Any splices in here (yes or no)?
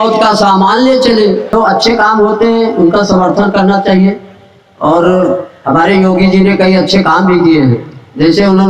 yes